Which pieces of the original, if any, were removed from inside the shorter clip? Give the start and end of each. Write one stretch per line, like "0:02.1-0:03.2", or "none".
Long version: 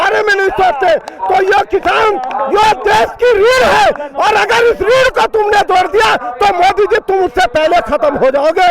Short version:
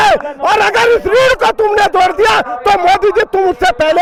none

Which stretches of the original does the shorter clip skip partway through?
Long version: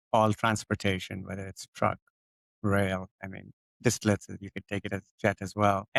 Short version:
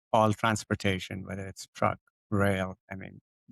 0:02.1-0:02.4

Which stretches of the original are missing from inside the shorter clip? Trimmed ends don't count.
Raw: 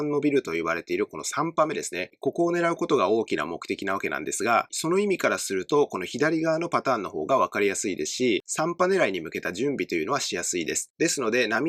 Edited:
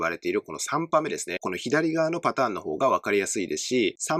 0:02.1-0:06.0

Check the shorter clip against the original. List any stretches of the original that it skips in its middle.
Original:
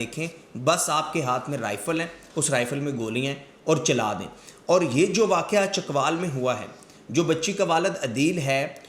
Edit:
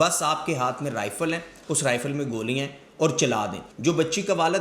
0:04.3-0:06.9

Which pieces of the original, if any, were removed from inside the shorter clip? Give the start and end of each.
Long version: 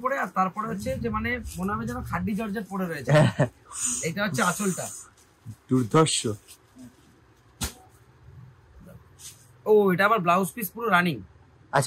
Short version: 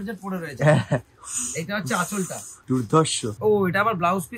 0:04.9-0:05.5
0:06.4-0:09.6

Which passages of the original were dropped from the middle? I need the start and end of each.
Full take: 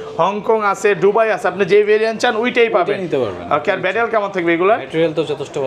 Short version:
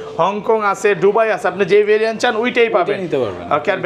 none

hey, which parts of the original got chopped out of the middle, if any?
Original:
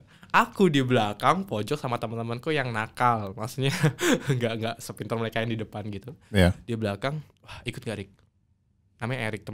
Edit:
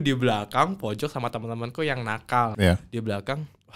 0:03.2-0:06.3

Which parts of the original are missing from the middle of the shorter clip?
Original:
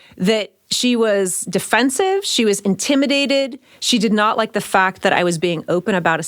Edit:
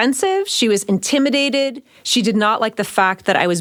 none

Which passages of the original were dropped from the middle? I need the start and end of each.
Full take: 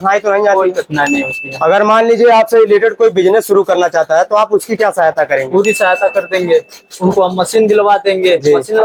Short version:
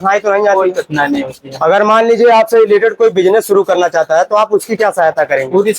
none

